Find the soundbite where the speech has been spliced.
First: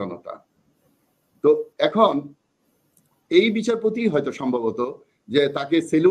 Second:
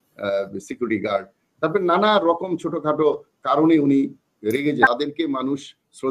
second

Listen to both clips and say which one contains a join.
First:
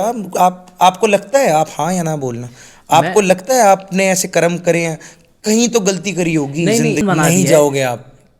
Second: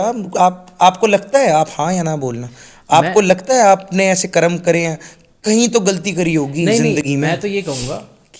first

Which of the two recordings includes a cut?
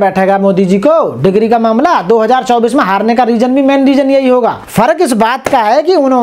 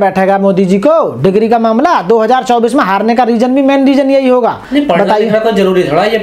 first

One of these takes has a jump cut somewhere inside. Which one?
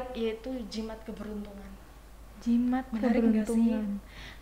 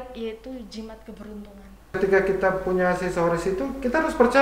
second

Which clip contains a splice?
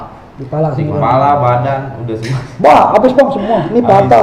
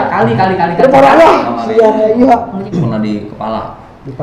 second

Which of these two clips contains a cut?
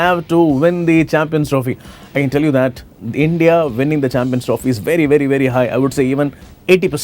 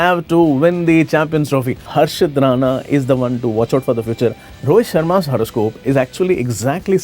second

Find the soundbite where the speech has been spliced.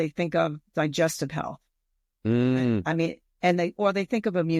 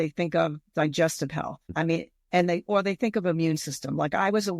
second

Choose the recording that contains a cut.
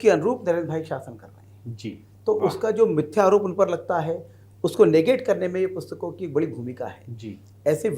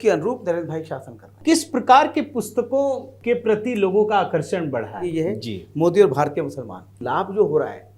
second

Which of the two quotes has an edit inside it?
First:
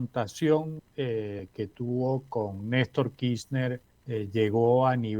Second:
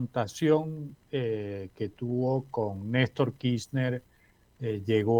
first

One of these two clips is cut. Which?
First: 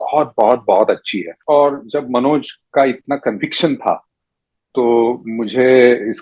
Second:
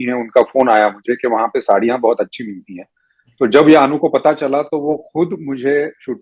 first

